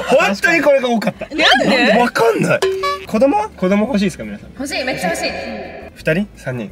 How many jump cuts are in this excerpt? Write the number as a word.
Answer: one